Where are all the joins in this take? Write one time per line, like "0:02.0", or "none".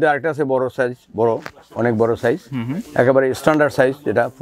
none